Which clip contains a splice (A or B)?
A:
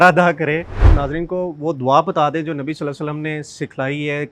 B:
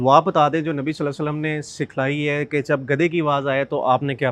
A